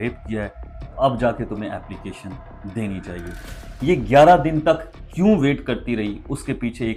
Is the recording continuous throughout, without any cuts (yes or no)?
yes